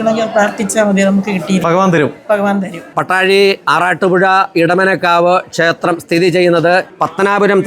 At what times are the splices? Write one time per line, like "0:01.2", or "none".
0:02.9